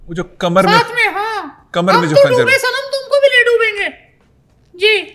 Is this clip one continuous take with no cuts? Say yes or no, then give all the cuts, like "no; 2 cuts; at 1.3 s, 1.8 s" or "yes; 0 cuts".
yes; 0 cuts